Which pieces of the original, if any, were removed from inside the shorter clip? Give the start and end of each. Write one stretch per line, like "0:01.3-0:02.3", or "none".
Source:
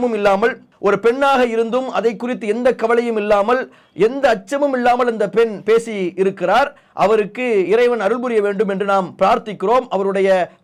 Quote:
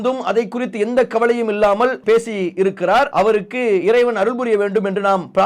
0:03.7-0:05.6
0:06.7-0:06.9